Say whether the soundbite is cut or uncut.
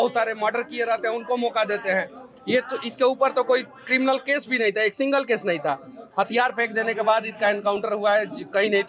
uncut